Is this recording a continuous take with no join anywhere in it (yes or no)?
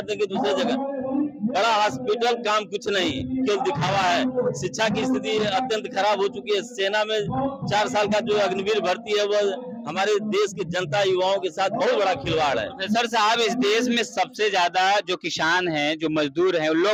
yes